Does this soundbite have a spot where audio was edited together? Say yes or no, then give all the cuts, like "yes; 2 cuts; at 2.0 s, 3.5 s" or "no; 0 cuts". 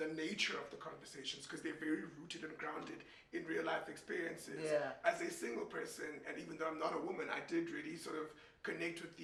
no; 0 cuts